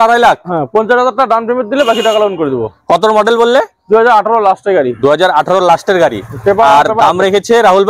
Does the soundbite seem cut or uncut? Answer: uncut